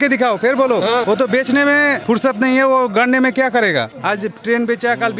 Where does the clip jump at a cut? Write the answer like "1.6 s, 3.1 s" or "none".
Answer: 1.0 s, 2.0 s, 4.0 s